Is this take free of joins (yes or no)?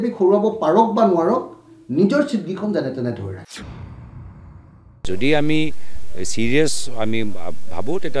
yes